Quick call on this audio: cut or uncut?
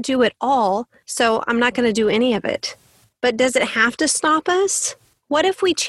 uncut